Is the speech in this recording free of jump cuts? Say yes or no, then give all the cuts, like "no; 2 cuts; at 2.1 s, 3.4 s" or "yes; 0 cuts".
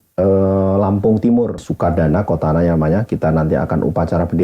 no; 1 cut; at 1.7 s